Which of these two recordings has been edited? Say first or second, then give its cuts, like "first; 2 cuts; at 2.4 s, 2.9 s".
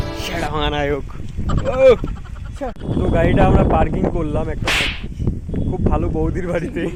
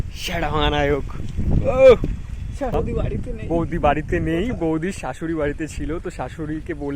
second; 1 cut; at 2.7 s